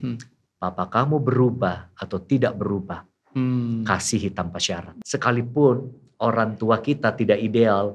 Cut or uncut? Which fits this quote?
cut